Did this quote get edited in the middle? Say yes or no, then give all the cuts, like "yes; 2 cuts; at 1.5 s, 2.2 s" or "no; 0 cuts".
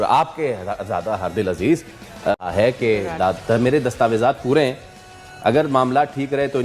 yes; 1 cut; at 2.4 s